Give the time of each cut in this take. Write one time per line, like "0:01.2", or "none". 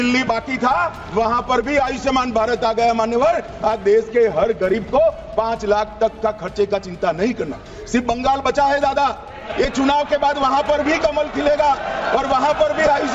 none

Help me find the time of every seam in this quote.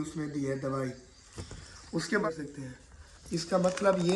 0:02.2

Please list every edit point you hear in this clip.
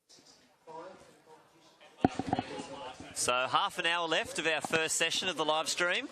0:01.7

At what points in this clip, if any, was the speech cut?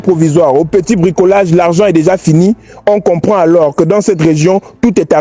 none

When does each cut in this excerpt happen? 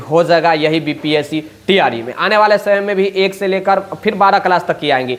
none

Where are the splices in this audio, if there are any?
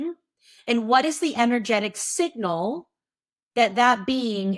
none

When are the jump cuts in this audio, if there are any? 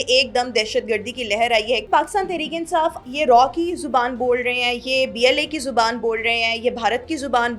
0:01.8
0:03.0

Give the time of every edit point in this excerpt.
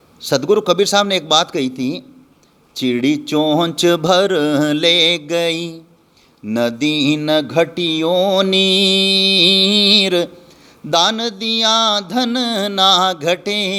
none

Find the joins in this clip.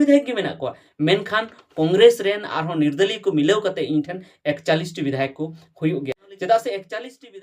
0:06.3

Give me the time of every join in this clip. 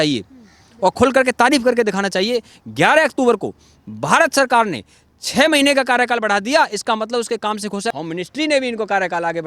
0:07.9

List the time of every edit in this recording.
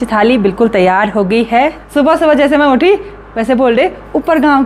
0:01.8

